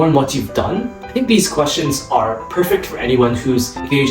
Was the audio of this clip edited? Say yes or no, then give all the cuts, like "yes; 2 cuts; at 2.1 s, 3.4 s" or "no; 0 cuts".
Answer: yes; 1 cut; at 1.0 s